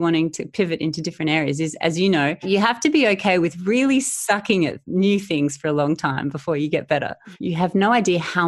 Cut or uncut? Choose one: cut